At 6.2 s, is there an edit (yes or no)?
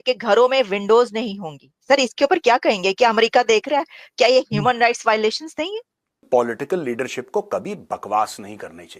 yes